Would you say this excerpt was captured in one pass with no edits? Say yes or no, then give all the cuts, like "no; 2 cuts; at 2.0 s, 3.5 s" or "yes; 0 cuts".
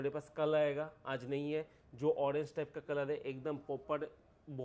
yes; 0 cuts